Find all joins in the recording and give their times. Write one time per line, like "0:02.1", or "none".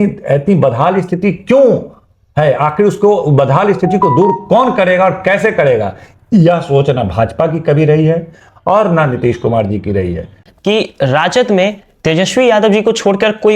0:10.4

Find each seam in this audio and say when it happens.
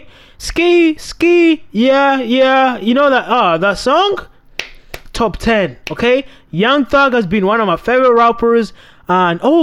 none

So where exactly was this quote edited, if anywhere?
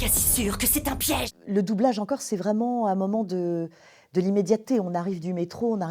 0:01.3

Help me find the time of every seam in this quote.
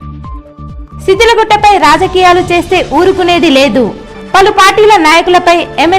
0:00.9

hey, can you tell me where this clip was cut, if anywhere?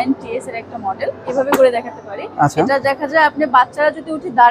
0:01.3

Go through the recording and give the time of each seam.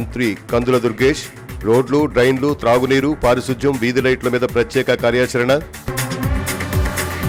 none

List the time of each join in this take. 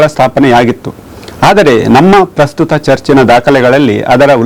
none

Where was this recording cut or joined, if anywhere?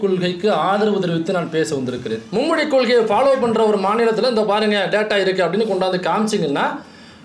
0:02.2

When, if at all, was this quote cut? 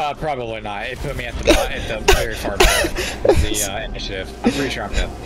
none

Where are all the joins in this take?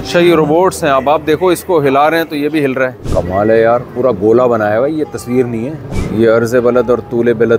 0:03.0
0:05.9

